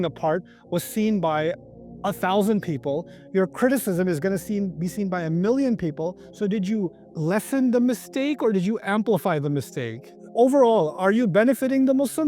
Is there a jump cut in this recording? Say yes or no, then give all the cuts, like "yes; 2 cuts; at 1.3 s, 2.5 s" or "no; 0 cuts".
yes; 1 cut; at 10.2 s